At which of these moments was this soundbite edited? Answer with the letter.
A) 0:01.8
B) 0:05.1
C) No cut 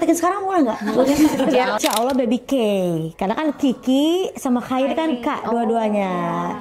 A